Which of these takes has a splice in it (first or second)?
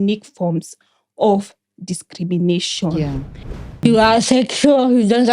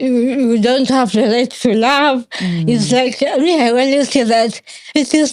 first